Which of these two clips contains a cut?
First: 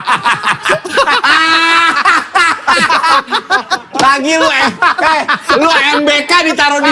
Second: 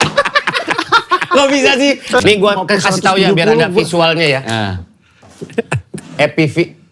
second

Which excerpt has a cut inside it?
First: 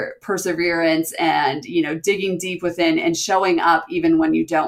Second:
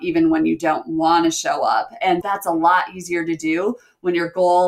second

